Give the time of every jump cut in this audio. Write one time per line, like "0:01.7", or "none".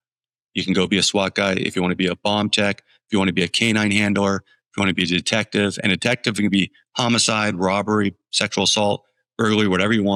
none